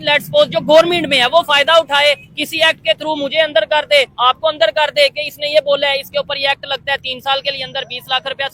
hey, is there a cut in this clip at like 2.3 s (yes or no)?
no